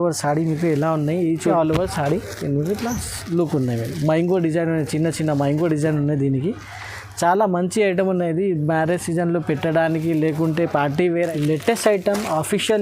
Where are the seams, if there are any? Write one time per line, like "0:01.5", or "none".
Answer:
0:01.5
0:11.3